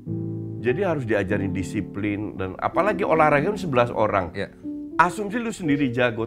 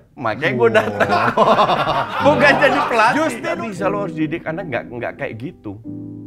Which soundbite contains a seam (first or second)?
second